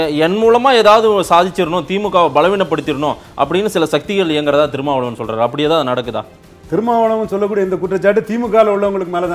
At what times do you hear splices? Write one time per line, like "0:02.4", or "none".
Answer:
none